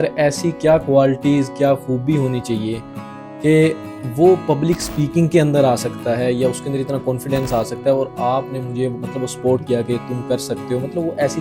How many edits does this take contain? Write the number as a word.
zero